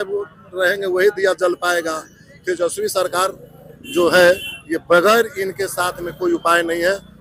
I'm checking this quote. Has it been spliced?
no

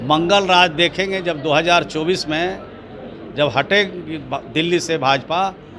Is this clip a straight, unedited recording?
yes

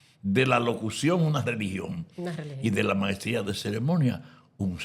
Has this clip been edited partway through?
no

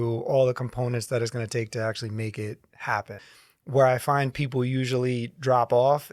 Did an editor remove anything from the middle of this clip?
yes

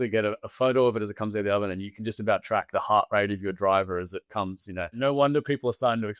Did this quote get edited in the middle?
yes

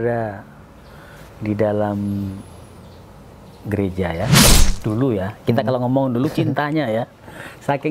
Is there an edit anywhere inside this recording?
yes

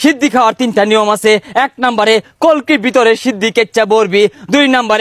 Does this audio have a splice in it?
no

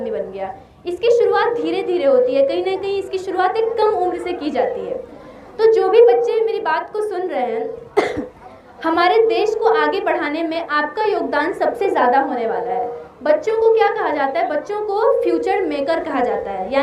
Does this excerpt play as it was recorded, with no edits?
yes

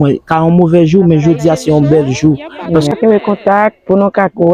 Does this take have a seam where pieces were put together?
yes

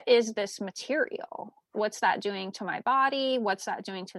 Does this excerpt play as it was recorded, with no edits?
no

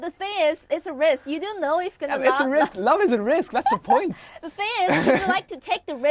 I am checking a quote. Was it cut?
no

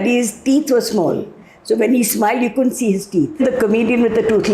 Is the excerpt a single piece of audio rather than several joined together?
no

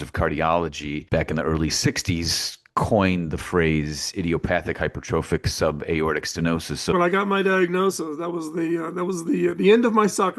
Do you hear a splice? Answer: yes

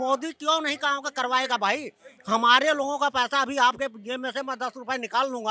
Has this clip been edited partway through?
no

